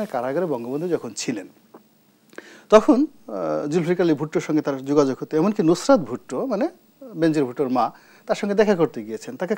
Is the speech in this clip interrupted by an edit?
no; 0 cuts

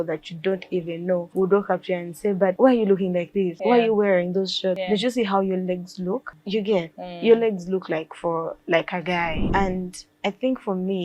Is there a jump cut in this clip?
yes; 6 cuts; at 1.3 s, 2.6 s, 3.5 s, 4.8 s, 6.3 s, 9.4 s

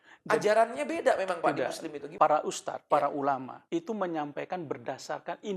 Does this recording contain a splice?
yes; 3 cuts; at 2.0 s, 2.7 s, 3.5 s

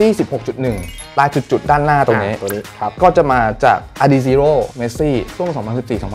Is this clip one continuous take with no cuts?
no; 1 cut; at 1.0 s

